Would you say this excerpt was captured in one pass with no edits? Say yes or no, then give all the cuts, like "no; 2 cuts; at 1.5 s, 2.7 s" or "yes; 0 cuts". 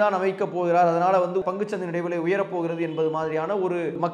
yes; 0 cuts